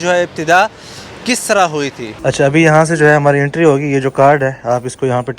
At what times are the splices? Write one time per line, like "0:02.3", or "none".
0:02.1